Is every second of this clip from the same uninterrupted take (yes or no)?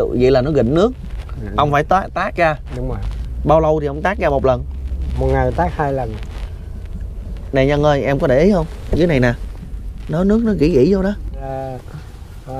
no